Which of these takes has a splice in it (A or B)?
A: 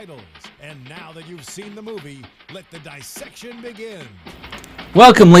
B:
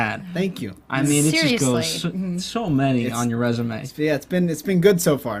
B